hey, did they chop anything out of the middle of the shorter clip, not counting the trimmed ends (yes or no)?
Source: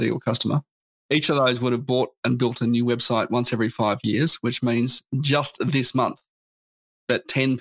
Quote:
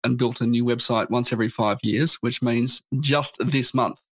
no